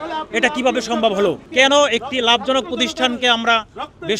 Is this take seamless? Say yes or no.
no